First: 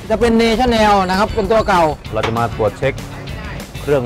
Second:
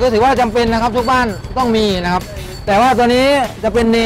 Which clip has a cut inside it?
first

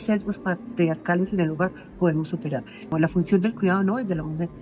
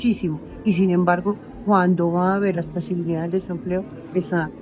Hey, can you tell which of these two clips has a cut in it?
first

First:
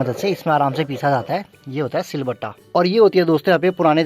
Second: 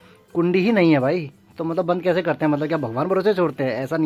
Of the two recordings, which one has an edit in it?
first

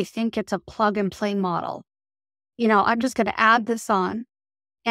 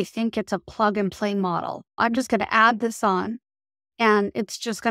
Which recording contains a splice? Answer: second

